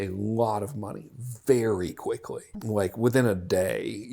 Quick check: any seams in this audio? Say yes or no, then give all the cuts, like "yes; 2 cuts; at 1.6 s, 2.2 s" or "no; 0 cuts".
yes; 1 cut; at 2.5 s